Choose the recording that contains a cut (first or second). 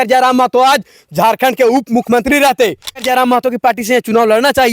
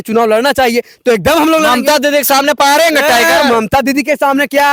first